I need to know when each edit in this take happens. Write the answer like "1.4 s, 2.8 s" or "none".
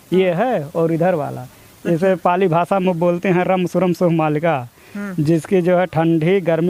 none